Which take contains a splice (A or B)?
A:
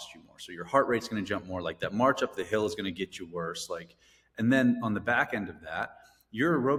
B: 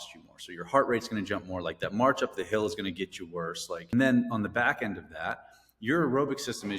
B